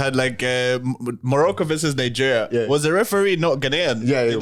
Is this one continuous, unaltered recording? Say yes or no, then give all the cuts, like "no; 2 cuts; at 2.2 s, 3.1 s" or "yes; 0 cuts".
yes; 0 cuts